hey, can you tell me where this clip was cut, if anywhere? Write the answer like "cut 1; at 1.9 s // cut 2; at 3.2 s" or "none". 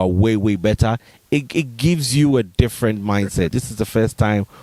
cut 1; at 3.5 s